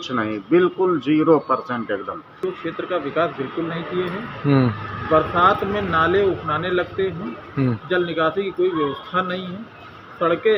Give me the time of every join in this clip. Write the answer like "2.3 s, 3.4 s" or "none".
2.4 s

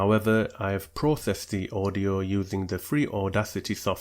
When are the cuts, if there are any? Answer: none

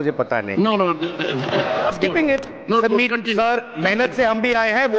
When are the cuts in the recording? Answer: 1.9 s

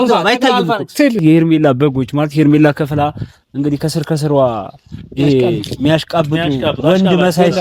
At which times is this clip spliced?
1.2 s

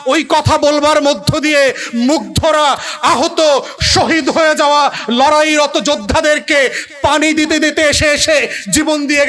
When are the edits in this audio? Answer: none

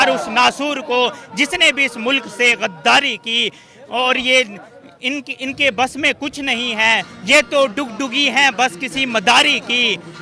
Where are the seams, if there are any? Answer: none

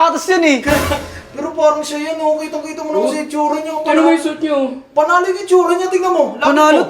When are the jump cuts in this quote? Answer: none

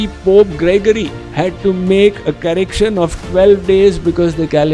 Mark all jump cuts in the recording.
none

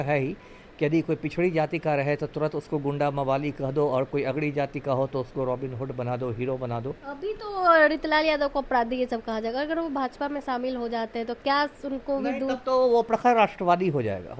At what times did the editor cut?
7.1 s

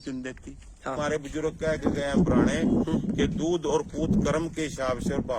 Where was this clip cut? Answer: 1.0 s

